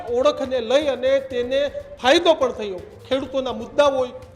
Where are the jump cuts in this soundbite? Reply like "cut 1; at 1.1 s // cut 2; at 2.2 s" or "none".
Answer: cut 1; at 2.9 s